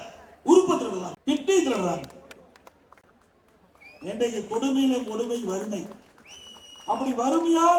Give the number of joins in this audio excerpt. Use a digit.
0